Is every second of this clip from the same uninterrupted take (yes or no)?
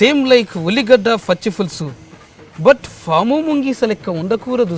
yes